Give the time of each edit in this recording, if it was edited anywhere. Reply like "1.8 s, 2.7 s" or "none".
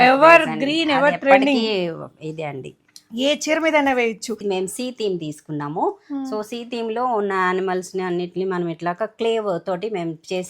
4.4 s